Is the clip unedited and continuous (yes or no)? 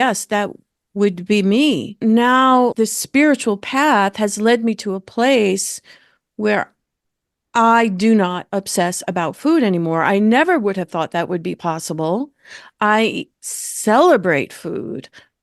yes